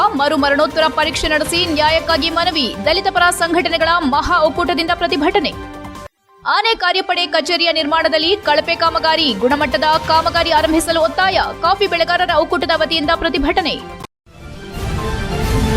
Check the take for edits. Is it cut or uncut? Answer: cut